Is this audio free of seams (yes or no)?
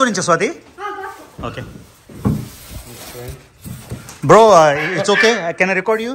yes